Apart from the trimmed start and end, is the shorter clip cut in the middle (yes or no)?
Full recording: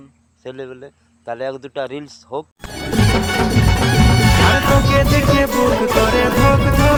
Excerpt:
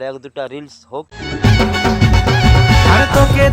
yes